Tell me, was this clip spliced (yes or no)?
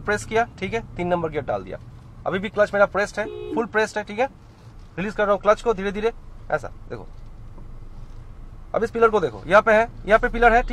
no